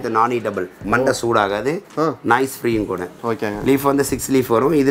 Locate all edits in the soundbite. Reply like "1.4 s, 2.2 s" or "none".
3.1 s

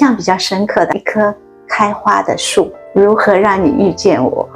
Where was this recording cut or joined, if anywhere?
0.9 s

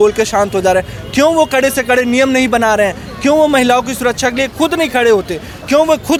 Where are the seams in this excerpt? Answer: none

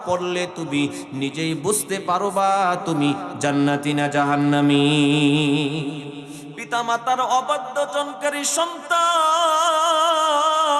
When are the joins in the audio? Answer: 6.3 s

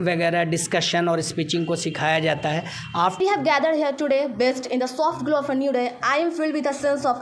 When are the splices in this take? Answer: 3.2 s

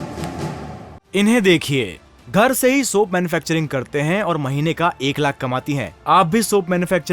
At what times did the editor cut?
0.9 s

